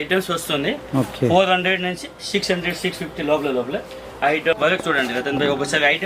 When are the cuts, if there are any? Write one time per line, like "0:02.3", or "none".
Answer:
0:04.6

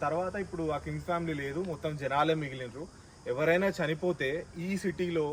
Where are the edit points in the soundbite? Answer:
none

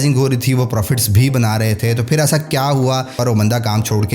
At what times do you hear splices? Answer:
0:03.2

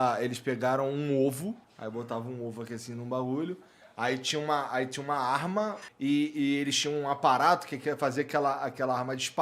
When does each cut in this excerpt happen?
0:01.7
0:05.8

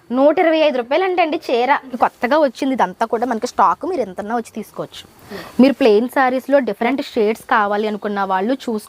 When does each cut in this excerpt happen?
0:01.9
0:05.2
0:06.8

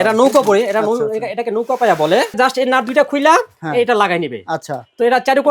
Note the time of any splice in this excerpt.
0:02.3

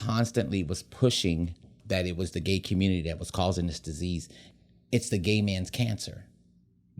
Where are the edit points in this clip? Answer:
0:01.7
0:04.4

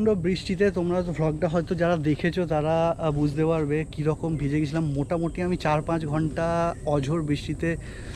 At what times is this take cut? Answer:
none

